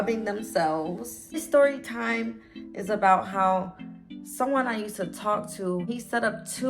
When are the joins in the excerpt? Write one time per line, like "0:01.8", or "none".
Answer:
0:01.4
0:05.8